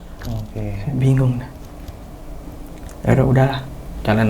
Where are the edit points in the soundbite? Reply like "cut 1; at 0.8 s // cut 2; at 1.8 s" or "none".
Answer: none